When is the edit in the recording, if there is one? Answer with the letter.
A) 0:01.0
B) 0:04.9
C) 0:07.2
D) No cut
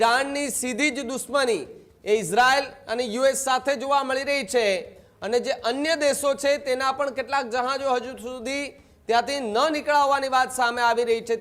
D